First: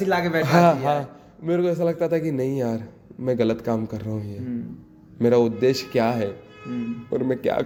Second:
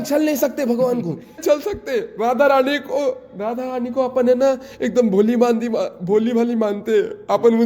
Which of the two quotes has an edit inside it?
second; 1 cut; at 1.4 s

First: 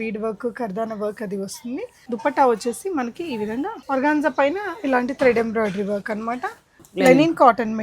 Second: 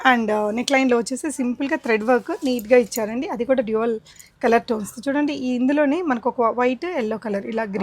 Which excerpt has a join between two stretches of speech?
first; 3 cuts; at 2.0 s, 3.8 s, 6.8 s

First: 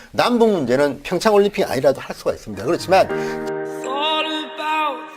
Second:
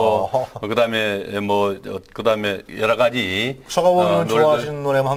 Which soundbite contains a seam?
first; 1 cut; at 3.1 s

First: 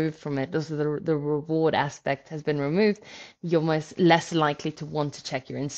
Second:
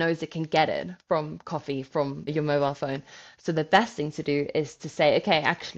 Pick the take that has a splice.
second; 1 cut; at 2.3 s

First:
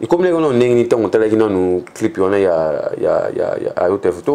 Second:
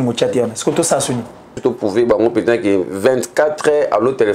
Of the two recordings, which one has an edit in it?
second; 1 cut; at 1.5 s

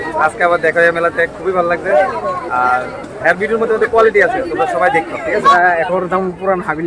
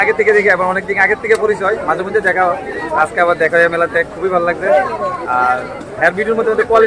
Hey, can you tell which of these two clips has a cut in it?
first; 1 cut; at 5.5 s

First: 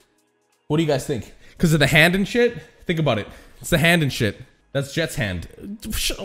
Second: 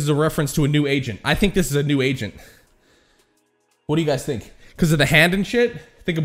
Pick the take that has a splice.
first; 1 cut; at 4.5 s

